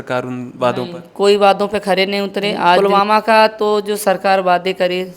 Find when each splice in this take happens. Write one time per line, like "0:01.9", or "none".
0:02.8